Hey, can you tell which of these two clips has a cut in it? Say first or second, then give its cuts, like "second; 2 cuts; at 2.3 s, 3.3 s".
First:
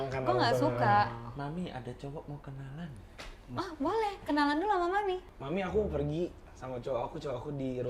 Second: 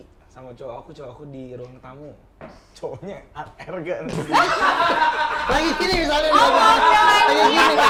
first; 1 cut; at 5.3 s